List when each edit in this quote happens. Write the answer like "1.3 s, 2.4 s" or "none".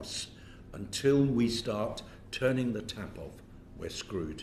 none